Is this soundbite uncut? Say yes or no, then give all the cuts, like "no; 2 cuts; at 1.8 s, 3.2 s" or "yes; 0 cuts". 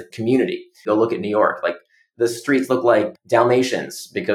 no; 2 cuts; at 0.8 s, 3.1 s